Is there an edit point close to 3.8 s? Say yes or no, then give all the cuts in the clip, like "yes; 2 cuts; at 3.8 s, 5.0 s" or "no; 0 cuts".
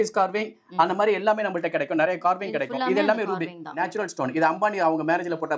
yes; 1 cut; at 3.8 s